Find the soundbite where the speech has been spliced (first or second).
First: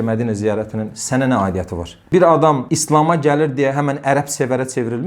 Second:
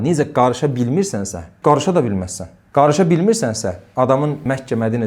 first